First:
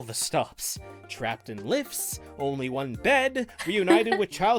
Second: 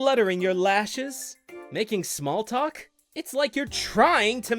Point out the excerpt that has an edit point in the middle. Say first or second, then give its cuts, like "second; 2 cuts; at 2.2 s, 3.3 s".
second; 2 cuts; at 1.4 s, 3.0 s